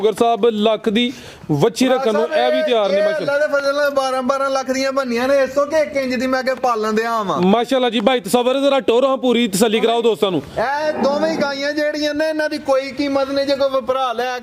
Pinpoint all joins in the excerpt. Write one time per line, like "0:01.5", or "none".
none